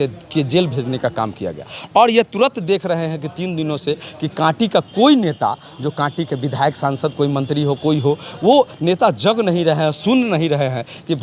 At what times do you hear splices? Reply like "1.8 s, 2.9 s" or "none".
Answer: none